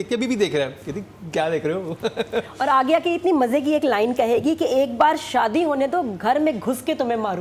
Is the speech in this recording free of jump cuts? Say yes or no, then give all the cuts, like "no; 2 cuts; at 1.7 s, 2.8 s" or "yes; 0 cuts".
yes; 0 cuts